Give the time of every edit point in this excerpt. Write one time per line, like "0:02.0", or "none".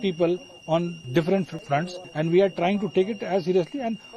0:01.0
0:01.8